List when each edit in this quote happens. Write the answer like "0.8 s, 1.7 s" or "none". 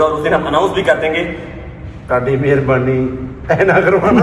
none

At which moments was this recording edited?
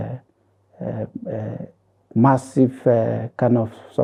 none

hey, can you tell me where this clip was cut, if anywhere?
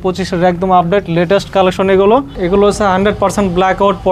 2.4 s

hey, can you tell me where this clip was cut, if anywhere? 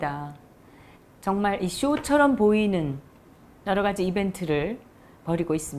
3.9 s

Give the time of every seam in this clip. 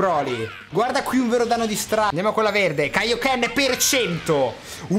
2.1 s

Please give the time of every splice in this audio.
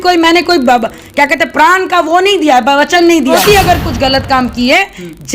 3.4 s

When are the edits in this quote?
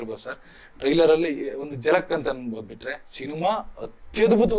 none

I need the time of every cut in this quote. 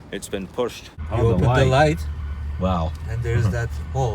1.0 s

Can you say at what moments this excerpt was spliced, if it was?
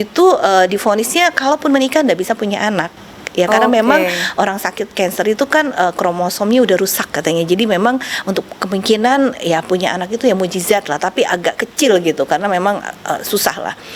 none

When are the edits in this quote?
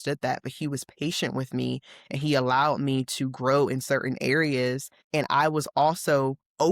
4.9 s

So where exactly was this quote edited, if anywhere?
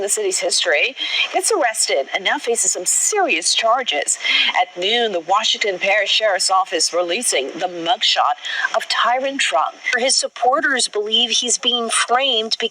9.9 s

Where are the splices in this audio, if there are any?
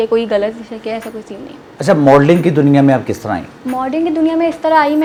none

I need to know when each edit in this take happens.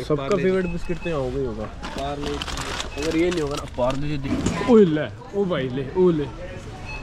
4.3 s

